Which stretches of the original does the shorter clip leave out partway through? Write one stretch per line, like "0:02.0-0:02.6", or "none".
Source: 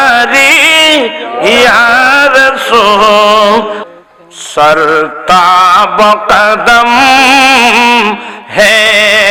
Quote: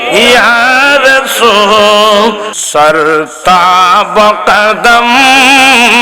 0:03.8-0:04.3